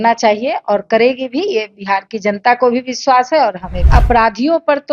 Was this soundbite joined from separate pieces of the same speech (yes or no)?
yes